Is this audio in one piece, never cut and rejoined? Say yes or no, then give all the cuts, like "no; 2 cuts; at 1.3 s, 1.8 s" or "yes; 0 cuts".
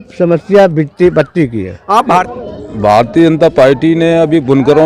no; 1 cut; at 2.3 s